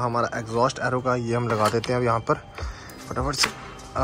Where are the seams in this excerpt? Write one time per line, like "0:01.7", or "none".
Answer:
none